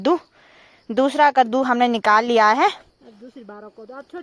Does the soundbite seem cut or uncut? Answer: uncut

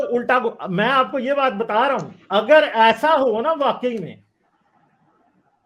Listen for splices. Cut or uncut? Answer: uncut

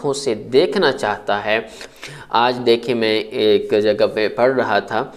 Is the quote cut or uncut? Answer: cut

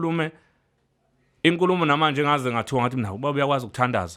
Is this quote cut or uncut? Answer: uncut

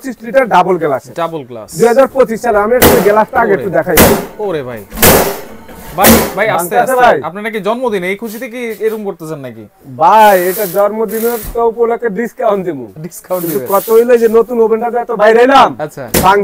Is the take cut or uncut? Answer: uncut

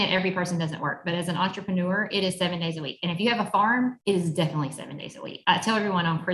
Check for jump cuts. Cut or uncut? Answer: cut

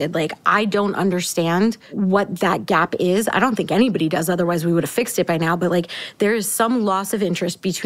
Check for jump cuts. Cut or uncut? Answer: cut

